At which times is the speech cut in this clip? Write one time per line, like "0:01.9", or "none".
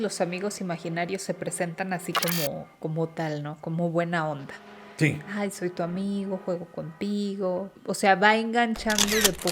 0:07.7